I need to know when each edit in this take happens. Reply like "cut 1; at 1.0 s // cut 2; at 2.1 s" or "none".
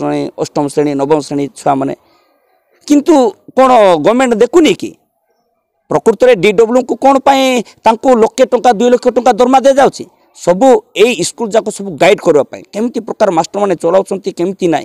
none